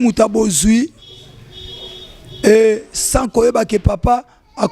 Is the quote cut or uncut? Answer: uncut